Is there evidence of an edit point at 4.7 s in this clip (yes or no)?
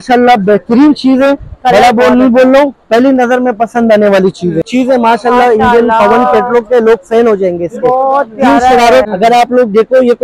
yes